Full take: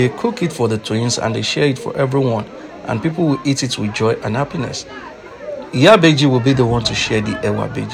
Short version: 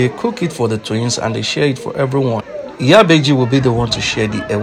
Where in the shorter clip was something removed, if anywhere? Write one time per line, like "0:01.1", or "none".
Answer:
0:02.6